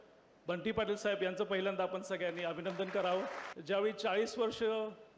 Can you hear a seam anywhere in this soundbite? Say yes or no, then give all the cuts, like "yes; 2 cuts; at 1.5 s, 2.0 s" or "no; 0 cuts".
yes; 1 cut; at 3.5 s